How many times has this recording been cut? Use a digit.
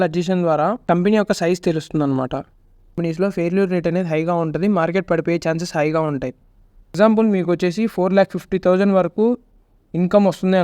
2